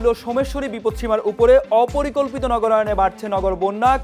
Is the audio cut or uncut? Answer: uncut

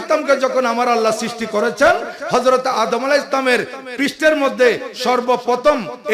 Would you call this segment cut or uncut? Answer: uncut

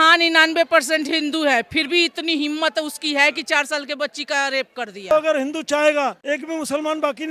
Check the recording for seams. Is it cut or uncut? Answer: cut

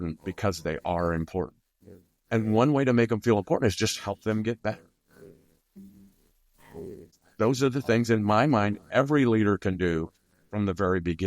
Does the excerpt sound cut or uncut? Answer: cut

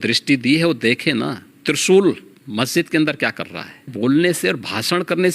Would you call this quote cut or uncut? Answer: cut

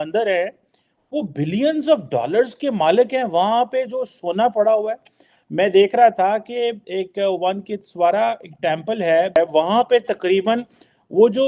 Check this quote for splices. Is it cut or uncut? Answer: cut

